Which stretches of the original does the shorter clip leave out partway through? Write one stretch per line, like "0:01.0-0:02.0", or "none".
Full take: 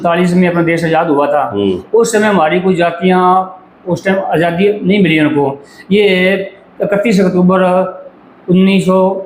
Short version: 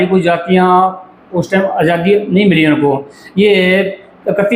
none